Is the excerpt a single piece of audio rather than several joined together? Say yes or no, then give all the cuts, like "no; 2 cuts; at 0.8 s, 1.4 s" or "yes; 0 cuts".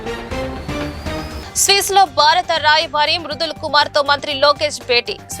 no; 1 cut; at 1.3 s